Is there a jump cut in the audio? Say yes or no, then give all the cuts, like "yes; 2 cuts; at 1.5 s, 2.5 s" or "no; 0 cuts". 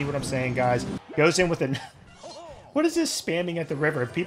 yes; 1 cut; at 1.0 s